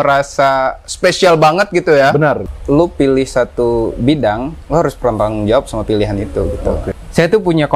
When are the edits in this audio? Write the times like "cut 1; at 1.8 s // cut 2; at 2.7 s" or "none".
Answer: cut 1; at 2.5 s // cut 2; at 6.9 s